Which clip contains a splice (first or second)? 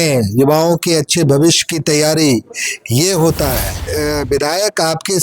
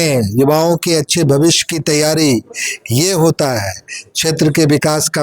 first